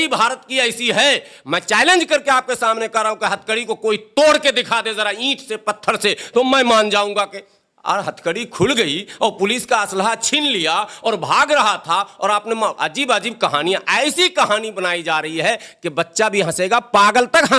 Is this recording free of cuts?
yes; 0 cuts

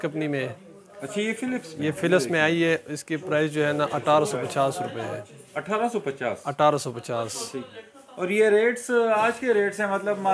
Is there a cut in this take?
no; 0 cuts

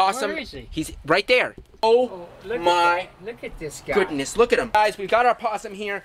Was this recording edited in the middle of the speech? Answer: yes; 2 cuts; at 1.8 s, 4.7 s

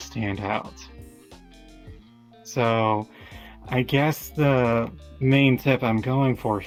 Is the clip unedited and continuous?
yes; 0 cuts

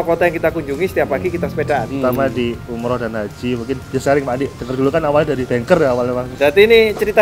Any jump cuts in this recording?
yes; 4 cuts; at 1.9 s, 3.8 s, 5.4 s, 6.3 s

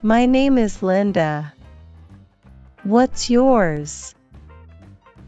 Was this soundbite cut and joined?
yes; 1 cut; at 4.0 s

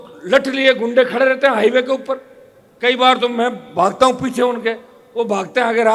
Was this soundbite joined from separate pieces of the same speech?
no; 0 cuts

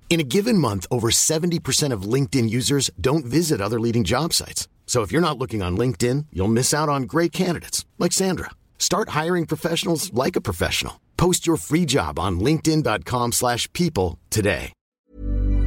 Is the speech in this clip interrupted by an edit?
yes; 1 cut; at 14.8 s

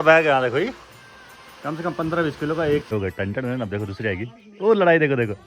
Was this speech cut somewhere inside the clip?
yes; 1 cut; at 2.9 s

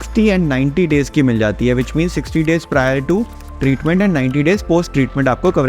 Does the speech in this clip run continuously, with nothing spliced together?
yes; 0 cuts

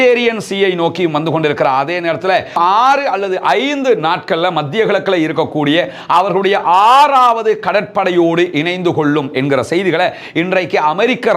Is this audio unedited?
yes; 0 cuts

